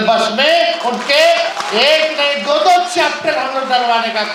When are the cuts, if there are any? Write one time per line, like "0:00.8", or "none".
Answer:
none